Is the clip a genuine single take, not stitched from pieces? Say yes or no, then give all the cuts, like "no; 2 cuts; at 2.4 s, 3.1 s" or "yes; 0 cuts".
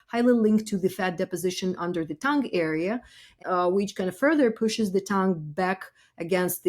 no; 1 cut; at 3.4 s